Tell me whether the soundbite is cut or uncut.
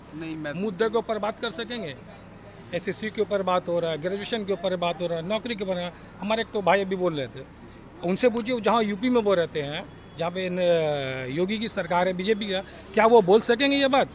uncut